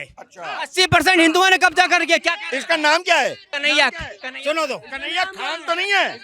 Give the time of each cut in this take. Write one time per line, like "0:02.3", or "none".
0:03.5